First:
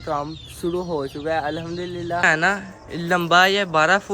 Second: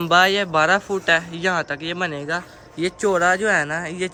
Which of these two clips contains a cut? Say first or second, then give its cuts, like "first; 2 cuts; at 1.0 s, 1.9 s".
first; 1 cut; at 2.2 s